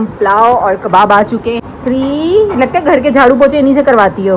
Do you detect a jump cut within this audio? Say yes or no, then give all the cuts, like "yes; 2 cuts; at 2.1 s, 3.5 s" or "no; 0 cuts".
yes; 1 cut; at 1.6 s